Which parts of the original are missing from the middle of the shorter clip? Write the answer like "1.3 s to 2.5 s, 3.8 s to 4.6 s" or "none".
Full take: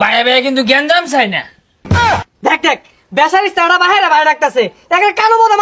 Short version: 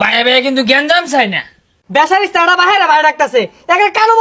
1.7 s to 2.9 s